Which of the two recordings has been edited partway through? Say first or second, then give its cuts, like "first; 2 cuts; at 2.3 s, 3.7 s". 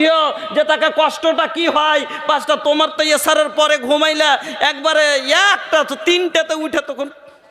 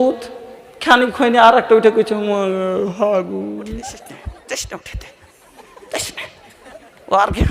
second; 1 cut; at 4.1 s